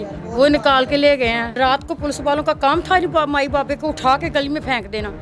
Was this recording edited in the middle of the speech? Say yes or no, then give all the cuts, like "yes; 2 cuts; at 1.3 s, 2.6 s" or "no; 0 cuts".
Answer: yes; 1 cut; at 1.5 s